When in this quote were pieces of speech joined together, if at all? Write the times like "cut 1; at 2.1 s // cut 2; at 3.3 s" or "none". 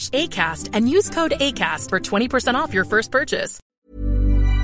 cut 1; at 3.6 s